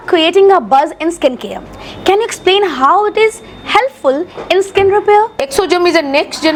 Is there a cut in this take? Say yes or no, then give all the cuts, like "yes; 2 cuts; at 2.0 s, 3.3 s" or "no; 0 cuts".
no; 0 cuts